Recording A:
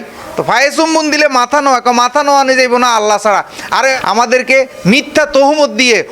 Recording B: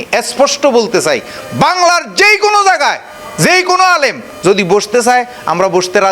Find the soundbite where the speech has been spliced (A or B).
A